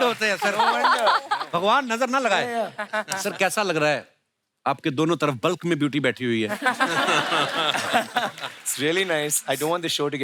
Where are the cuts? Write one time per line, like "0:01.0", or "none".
none